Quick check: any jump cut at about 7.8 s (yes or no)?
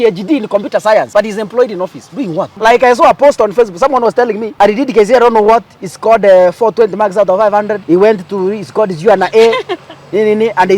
yes